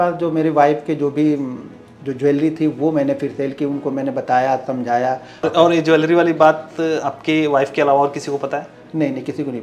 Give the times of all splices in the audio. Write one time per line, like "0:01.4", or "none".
0:05.5